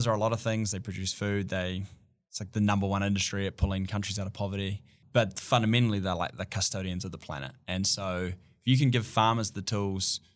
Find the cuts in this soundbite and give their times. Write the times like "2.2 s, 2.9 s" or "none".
5.0 s